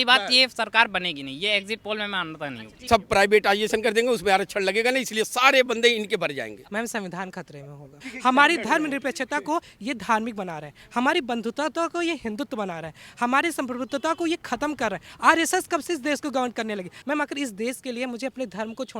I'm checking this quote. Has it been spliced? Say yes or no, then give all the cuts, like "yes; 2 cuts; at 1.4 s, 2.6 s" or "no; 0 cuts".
yes; 4 cuts; at 2.8 s, 6.6 s, 8.1 s, 16.9 s